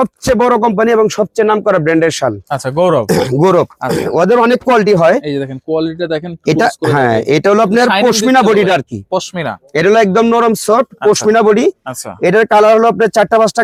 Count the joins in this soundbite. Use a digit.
0